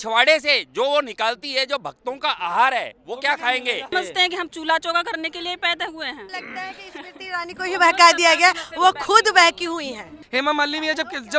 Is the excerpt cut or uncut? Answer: cut